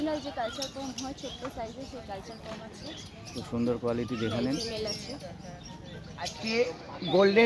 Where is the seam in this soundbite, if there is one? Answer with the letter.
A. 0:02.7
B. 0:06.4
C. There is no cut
B